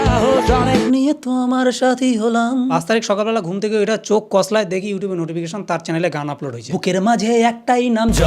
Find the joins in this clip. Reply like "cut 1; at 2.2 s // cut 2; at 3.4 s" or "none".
cut 1; at 0.9 s // cut 2; at 2.8 s